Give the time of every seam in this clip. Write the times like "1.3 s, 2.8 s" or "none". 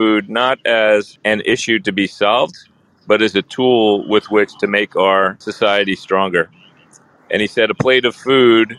1.2 s, 5.4 s